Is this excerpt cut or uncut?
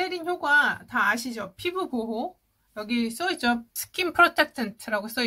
cut